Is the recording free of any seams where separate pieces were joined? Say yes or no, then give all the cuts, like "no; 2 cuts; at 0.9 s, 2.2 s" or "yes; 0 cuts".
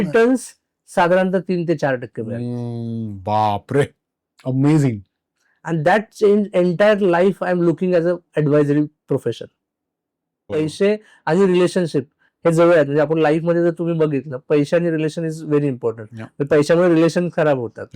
no; 1 cut; at 10.5 s